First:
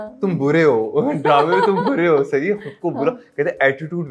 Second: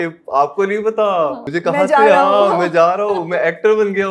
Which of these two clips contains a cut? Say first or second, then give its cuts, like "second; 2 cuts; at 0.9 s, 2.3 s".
second; 1 cut; at 1.5 s